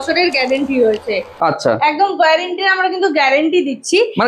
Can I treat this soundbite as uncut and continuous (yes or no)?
yes